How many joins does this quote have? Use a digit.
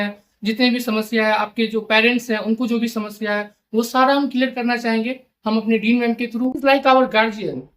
1